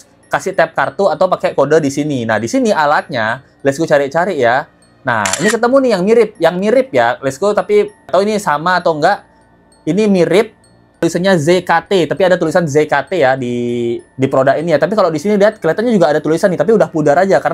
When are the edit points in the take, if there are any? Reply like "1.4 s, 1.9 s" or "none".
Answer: none